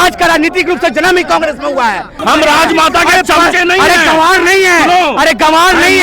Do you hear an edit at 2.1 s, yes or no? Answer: yes